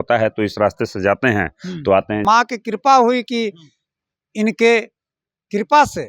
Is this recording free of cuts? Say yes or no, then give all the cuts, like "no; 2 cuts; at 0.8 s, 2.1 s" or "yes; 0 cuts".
no; 1 cut; at 2.2 s